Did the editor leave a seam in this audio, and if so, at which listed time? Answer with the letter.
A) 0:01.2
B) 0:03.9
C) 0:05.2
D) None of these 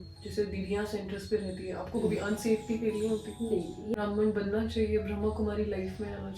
B